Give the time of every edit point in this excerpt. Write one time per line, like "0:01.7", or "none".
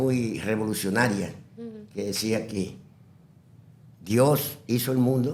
none